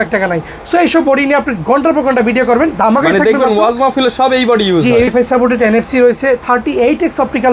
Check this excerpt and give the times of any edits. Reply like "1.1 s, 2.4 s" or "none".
5.1 s